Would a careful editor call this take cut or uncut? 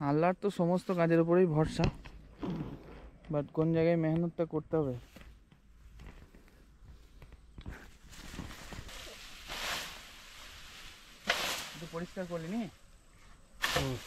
cut